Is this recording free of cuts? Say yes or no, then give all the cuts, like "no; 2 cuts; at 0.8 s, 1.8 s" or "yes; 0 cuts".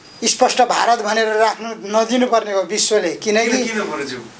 yes; 0 cuts